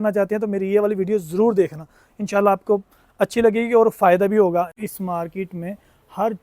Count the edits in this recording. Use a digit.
1